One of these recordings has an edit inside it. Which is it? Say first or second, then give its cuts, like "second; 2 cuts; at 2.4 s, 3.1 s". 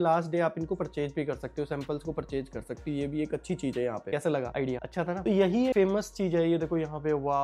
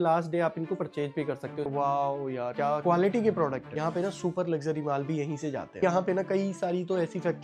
second; 3 cuts; at 1.7 s, 3.7 s, 5.8 s